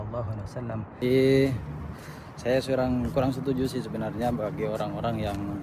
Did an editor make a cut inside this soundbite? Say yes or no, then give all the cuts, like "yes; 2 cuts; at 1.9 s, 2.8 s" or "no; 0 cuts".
yes; 1 cut; at 1.0 s